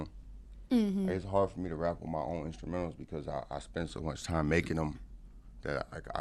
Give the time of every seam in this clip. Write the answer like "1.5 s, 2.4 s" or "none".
none